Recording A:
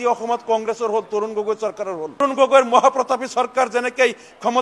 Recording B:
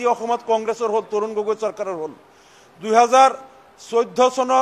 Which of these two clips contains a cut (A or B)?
A